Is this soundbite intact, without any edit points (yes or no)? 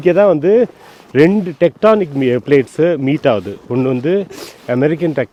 yes